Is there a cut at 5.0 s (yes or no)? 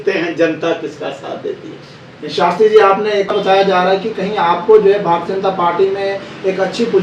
no